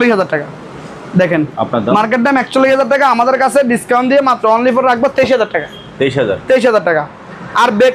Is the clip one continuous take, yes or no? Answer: yes